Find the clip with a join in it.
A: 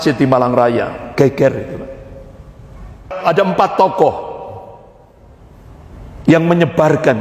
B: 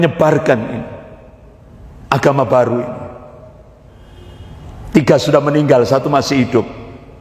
A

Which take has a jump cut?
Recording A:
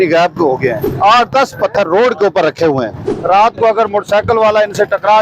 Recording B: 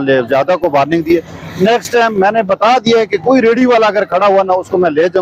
A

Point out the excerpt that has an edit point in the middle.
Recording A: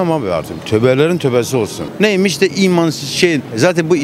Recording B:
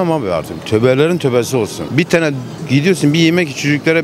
A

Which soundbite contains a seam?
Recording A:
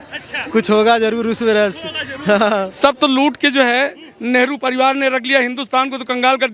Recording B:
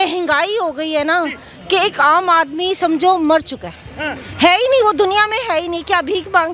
A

